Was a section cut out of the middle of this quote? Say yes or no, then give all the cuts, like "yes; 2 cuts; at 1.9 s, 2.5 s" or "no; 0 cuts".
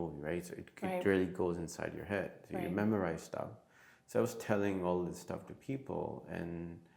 no; 0 cuts